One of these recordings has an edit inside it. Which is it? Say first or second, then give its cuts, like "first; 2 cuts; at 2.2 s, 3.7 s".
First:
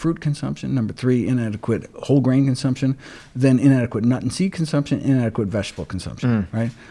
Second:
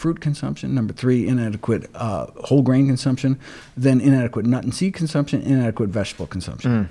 first; 1 cut; at 1.9 s